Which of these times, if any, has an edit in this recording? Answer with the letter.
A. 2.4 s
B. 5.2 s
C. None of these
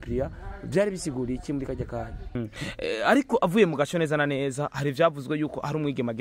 A